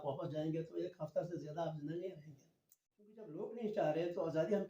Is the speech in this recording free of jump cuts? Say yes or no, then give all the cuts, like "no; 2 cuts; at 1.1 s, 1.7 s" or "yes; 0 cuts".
no; 1 cut; at 3.3 s